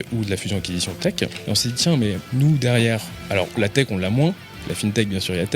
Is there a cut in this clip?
yes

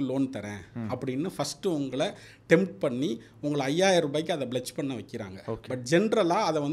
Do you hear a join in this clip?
no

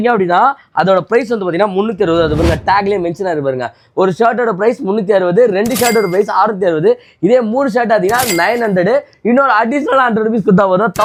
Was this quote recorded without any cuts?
yes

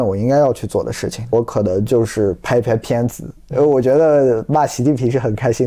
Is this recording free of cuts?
no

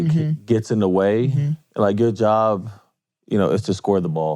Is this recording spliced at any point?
no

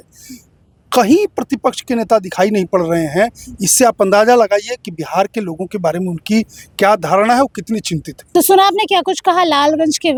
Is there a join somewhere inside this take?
no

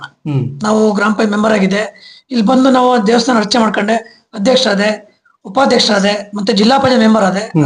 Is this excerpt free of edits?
yes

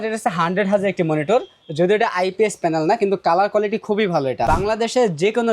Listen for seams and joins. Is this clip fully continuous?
no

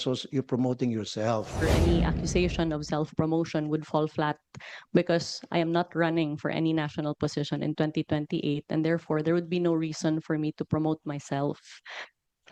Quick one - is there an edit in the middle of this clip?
no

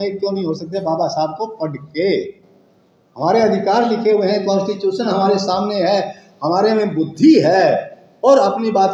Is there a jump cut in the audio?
no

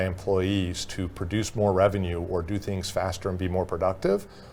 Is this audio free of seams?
yes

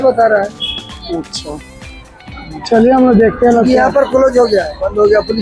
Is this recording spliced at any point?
no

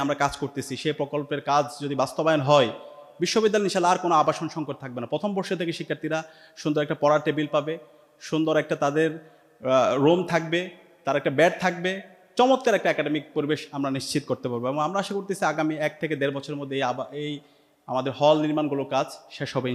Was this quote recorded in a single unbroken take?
yes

